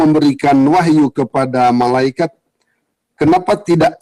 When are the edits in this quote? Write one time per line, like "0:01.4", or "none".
none